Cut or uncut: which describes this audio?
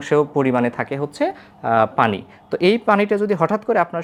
uncut